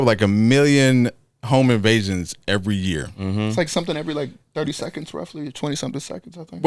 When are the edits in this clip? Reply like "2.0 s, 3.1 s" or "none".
none